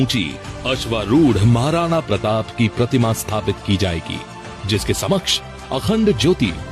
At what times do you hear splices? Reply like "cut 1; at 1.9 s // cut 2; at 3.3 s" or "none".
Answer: cut 1; at 4.1 s